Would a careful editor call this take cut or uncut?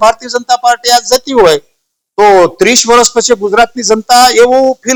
uncut